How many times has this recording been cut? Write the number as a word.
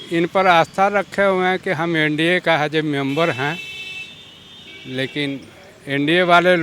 zero